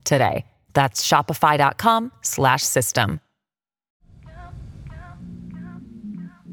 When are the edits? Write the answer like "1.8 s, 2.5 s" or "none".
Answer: 4.0 s